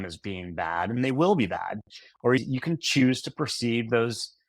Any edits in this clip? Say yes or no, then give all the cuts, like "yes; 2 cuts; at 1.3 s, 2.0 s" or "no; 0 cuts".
yes; 1 cut; at 2.4 s